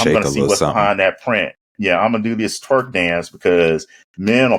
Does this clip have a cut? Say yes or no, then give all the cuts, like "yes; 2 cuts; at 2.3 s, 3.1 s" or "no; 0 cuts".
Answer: no; 0 cuts